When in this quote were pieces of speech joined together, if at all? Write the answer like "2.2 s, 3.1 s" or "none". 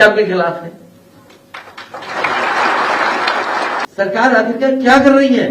3.8 s